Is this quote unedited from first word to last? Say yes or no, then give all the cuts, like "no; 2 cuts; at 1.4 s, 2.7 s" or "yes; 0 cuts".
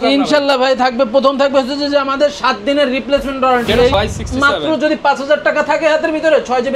no; 1 cut; at 3.9 s